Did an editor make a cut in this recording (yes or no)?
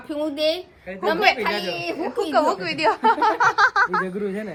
no